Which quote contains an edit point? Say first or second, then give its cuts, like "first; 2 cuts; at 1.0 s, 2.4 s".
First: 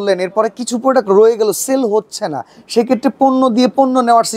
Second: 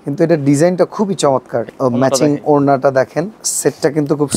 second; 2 cuts; at 1.7 s, 3.4 s